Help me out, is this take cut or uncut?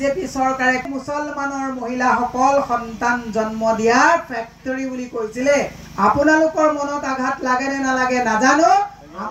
uncut